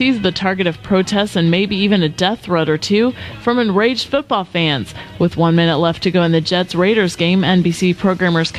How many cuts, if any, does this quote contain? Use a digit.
1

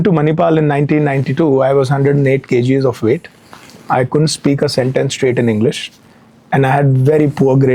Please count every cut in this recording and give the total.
0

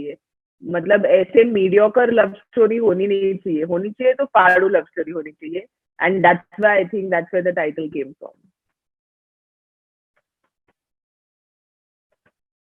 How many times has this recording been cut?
0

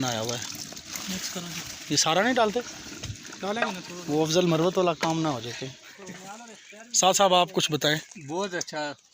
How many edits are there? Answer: 1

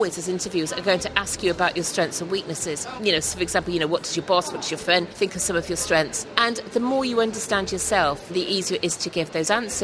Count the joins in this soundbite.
4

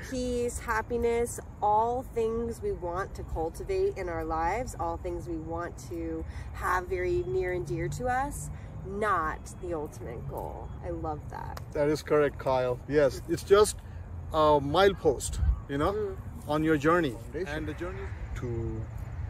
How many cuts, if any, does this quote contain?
1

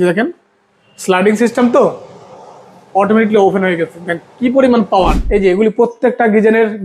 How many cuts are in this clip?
1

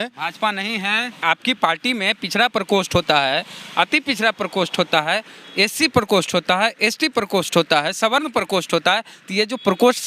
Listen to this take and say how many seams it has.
1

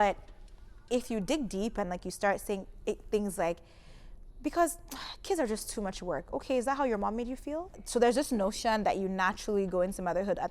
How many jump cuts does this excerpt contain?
1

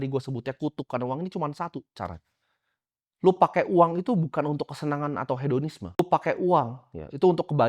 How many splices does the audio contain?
1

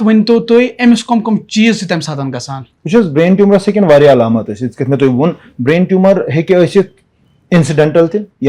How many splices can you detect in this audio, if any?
0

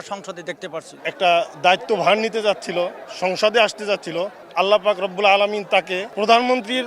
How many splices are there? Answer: 3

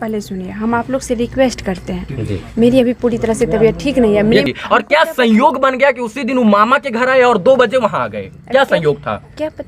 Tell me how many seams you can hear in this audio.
1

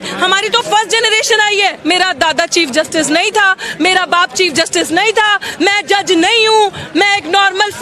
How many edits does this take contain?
1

